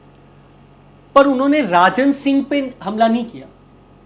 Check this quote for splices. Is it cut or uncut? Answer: uncut